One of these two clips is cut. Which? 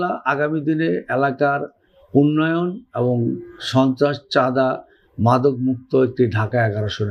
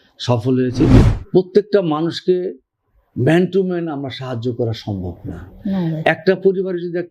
second; 1 cut; at 1.0 s

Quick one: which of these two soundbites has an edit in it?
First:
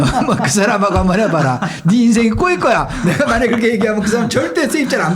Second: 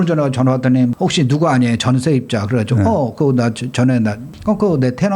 second; 2 cuts; at 0.9 s, 4.3 s

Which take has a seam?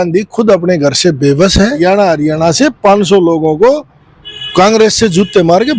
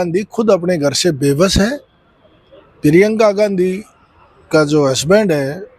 first; 1 cut; at 1.8 s

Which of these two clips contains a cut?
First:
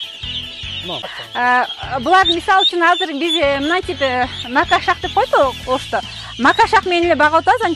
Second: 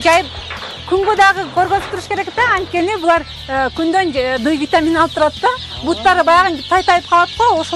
first; 1 cut; at 1.0 s

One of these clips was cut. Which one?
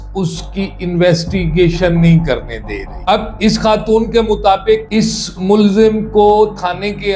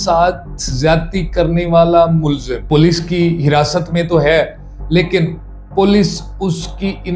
first; 1 cut; at 3.0 s

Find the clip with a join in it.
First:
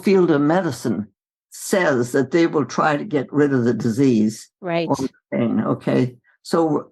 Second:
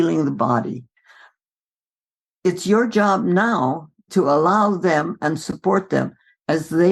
second; 1 cut; at 4.0 s

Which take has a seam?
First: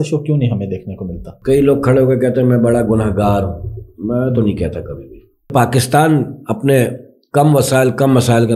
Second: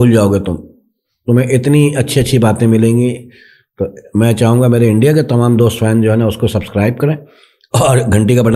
first; 2 cuts; at 1.3 s, 5.5 s

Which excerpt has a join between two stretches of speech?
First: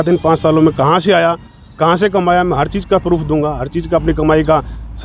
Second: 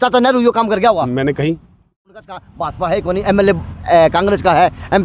second; 1 cut; at 1.8 s

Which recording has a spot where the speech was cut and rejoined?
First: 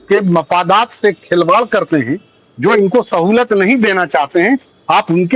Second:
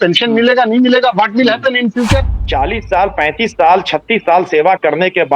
second; 1 cut; at 2.4 s

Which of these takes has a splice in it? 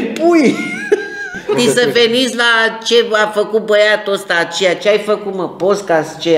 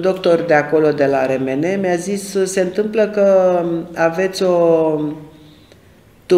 first; 1 cut; at 1.6 s

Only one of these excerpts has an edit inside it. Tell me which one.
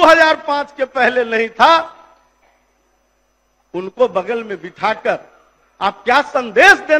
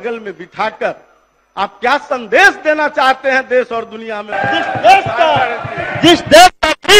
second; 1 cut; at 4.3 s

